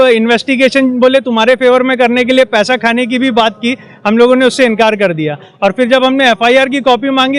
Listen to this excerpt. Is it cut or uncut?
uncut